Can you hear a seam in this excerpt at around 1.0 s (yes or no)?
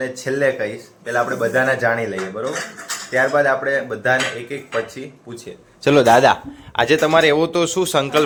no